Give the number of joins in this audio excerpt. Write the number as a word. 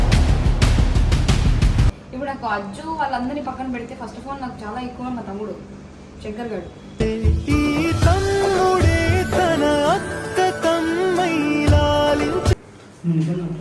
two